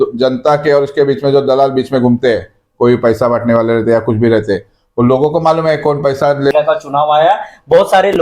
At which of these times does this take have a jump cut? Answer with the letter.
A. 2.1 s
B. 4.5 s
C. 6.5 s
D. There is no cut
C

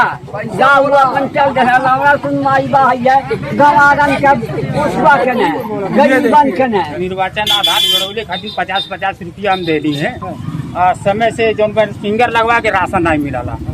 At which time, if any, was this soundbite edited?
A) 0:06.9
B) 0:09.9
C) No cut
A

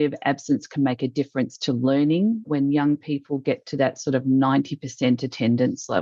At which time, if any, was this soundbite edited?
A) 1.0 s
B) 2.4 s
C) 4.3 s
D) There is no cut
B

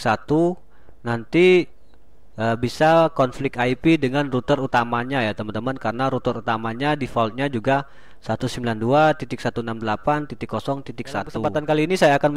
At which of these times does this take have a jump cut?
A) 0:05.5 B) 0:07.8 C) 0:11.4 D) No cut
C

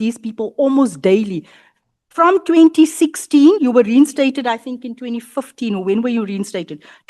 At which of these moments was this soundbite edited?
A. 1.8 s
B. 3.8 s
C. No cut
C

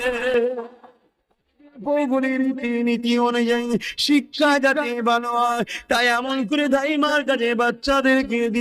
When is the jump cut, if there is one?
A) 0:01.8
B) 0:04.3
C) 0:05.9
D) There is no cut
A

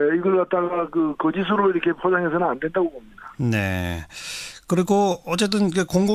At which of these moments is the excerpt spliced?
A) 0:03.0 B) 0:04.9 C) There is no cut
A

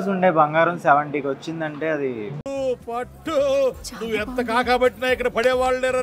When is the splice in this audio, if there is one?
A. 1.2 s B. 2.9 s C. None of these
C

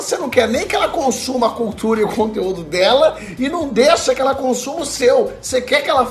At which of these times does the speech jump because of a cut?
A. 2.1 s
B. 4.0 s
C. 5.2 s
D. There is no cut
D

